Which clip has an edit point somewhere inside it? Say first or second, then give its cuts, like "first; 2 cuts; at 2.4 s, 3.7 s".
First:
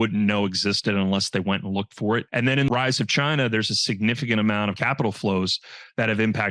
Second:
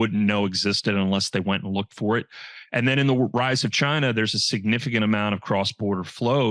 first; 2 cuts; at 2.7 s, 4.8 s